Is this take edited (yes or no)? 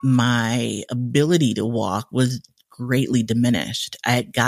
no